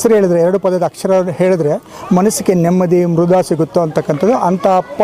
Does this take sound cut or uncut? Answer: uncut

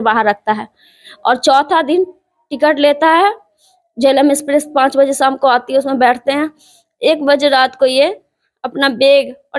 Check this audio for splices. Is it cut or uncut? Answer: uncut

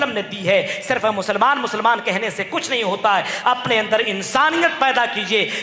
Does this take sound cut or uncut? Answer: uncut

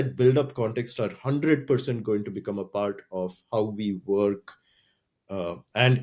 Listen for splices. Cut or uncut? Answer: uncut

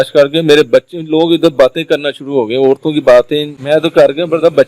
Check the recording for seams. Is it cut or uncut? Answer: cut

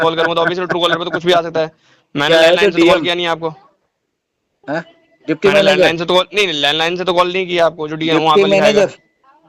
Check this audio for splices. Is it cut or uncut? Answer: uncut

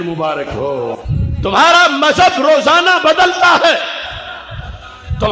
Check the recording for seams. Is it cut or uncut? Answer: cut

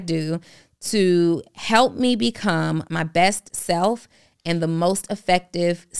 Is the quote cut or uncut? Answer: cut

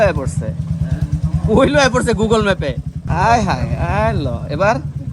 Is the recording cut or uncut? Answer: cut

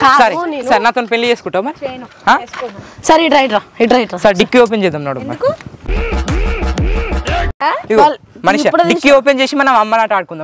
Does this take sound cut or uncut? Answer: uncut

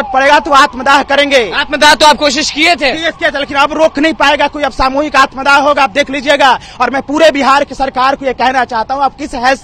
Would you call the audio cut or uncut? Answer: uncut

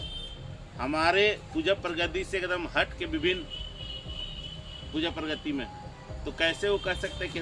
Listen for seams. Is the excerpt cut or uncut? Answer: uncut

